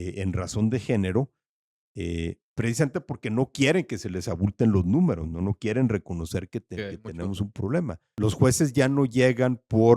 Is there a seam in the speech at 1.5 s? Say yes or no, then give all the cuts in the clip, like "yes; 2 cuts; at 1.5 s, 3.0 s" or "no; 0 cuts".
no; 1 cut; at 8.0 s